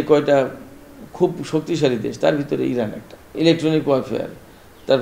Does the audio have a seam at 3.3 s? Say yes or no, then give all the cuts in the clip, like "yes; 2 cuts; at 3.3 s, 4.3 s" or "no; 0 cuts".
yes; 1 cut; at 3.3 s